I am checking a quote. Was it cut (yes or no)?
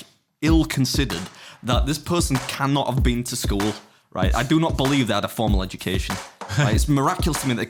no